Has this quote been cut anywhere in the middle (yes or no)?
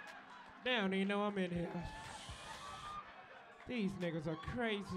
no